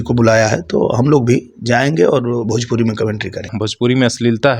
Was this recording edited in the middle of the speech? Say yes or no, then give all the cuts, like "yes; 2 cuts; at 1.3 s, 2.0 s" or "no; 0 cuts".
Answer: yes; 1 cut; at 3.6 s